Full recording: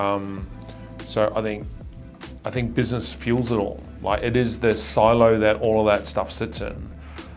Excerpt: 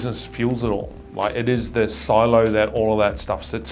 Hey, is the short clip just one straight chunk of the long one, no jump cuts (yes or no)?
yes